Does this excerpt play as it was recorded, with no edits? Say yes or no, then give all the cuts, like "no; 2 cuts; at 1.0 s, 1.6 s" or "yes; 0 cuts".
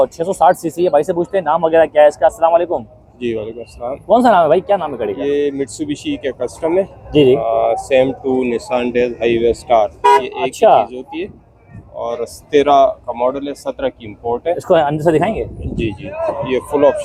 yes; 0 cuts